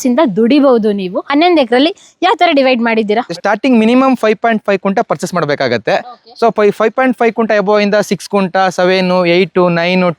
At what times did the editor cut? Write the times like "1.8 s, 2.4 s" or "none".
1.2 s, 3.3 s